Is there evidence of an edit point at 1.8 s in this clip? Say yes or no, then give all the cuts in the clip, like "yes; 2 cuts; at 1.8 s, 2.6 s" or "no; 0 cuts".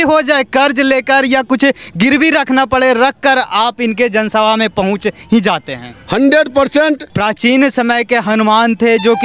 no; 1 cut; at 7.1 s